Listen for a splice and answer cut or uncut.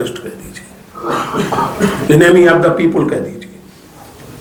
uncut